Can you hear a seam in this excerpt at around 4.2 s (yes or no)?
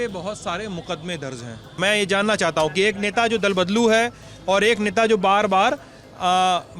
no